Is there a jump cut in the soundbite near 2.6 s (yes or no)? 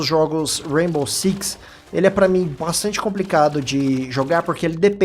yes